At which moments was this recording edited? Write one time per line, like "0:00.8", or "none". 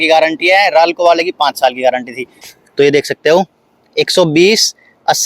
0:02.5